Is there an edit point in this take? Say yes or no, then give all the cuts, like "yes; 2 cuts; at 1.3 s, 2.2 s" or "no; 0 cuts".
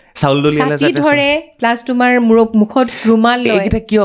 no; 0 cuts